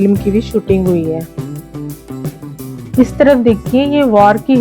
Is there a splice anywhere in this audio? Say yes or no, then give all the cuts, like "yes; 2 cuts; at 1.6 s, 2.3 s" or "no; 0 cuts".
yes; 2 cuts; at 1.3 s, 2.9 s